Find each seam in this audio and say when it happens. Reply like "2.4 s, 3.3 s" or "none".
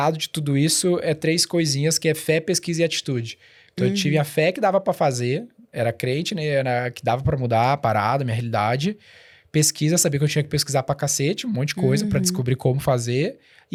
none